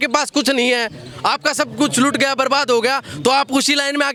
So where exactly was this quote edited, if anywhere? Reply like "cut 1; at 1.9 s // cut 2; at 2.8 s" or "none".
none